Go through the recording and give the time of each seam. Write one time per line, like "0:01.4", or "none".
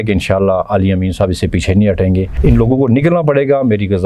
0:02.3